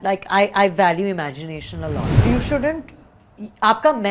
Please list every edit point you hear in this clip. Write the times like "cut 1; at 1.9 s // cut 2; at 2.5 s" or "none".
cut 1; at 2.1 s